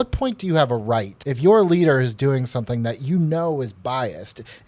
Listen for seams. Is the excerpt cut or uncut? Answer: cut